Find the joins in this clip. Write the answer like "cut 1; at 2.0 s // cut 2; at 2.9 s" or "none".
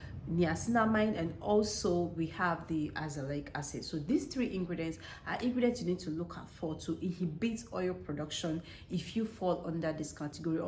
none